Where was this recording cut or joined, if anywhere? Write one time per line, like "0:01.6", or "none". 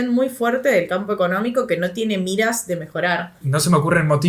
0:03.4

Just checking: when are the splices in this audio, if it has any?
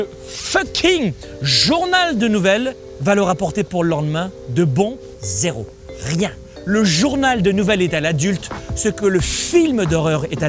0:02.8
0:05.0
0:06.5

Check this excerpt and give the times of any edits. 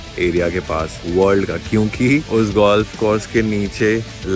none

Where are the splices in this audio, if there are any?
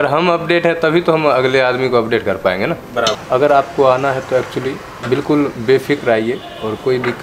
0:03.2

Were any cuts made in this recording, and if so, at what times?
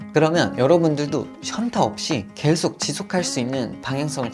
none

